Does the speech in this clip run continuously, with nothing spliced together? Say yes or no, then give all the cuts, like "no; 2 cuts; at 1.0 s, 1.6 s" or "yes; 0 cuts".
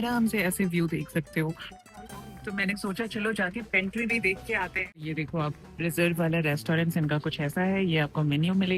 no; 1 cut; at 5.0 s